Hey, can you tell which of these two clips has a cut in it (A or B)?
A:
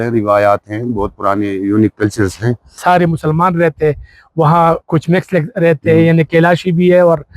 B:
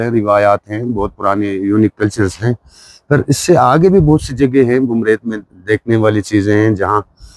A